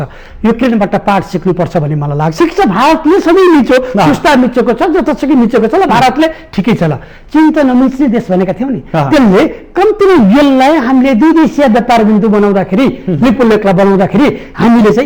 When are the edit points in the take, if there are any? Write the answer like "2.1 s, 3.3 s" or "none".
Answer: 2.3 s